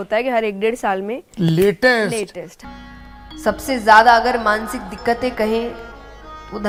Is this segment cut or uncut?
uncut